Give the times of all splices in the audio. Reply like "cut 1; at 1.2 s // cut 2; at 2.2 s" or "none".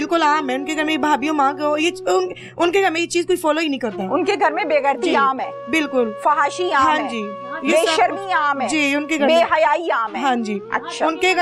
none